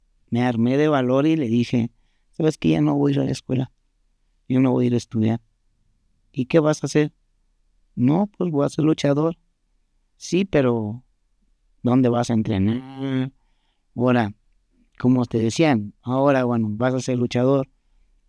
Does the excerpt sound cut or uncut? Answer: uncut